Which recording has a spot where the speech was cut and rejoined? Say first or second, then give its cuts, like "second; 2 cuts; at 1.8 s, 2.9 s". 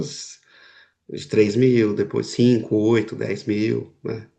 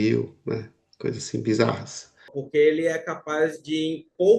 second; 1 cut; at 2.3 s